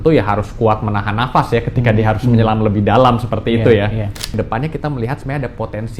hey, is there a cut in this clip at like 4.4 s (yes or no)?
yes